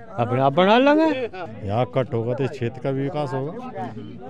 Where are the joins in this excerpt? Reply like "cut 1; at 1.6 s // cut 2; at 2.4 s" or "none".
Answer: cut 1; at 1.4 s